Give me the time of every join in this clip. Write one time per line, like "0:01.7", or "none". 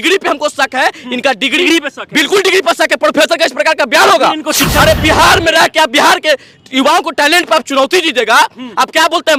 none